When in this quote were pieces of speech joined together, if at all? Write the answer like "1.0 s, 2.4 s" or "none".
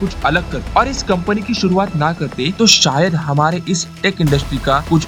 none